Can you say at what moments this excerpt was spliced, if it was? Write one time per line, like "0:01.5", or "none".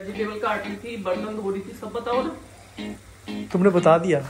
none